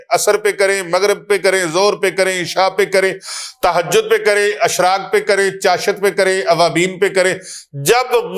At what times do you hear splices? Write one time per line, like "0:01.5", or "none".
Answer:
none